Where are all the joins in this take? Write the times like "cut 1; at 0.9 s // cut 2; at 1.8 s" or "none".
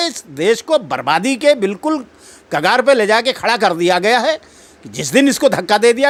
none